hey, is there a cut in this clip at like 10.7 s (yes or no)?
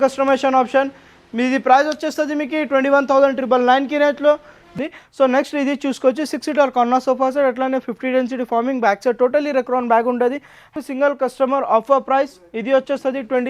yes